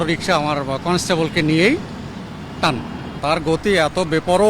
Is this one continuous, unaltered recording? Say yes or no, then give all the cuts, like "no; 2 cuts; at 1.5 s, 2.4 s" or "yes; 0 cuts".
no; 1 cut; at 3.1 s